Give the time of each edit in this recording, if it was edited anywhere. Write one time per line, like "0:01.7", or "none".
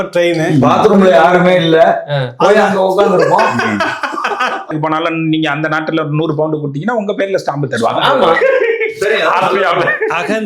0:04.7